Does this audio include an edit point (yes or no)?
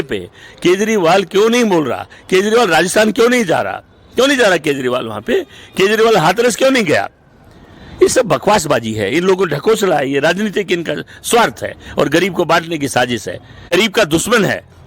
yes